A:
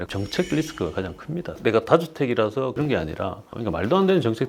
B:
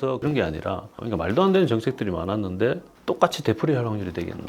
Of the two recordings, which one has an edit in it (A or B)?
A